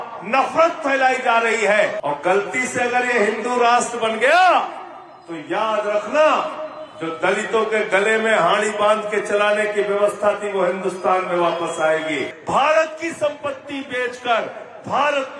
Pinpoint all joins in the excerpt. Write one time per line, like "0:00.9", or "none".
0:02.0
0:12.3